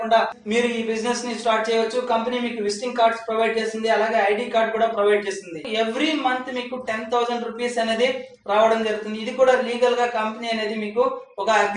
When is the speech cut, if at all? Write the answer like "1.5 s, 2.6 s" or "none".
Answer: 5.6 s